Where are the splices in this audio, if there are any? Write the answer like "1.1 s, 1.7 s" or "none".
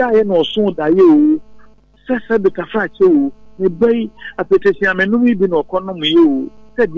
none